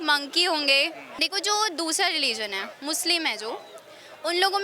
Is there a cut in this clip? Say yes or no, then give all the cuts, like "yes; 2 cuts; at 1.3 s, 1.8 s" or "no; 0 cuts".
yes; 1 cut; at 1.1 s